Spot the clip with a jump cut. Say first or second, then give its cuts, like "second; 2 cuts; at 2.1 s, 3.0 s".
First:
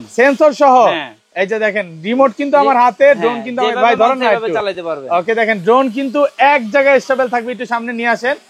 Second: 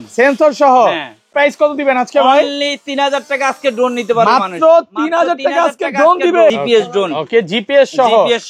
second; 2 cuts; at 1.3 s, 6.6 s